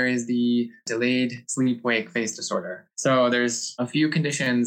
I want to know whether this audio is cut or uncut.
cut